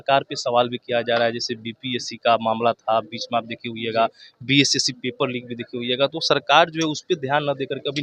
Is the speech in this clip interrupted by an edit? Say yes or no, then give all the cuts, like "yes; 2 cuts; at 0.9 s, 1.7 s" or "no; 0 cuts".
no; 0 cuts